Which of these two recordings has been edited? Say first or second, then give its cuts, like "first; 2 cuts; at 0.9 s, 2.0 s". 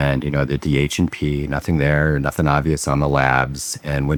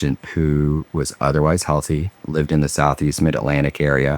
second; 1 cut; at 2.2 s